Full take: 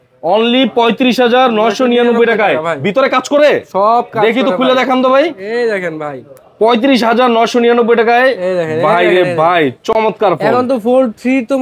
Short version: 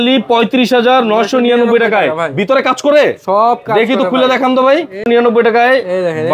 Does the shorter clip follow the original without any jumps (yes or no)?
no